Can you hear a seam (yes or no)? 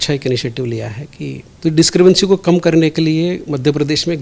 yes